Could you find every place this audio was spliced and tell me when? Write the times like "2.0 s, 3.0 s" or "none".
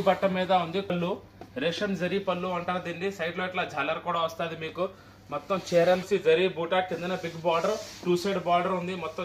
0.9 s, 6.0 s